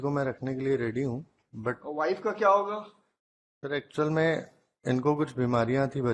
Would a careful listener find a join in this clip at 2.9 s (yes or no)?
no